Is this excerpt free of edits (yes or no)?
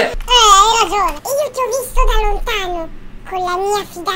no